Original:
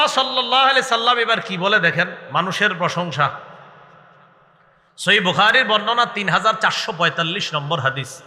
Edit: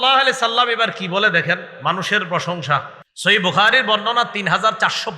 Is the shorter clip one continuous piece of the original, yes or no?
no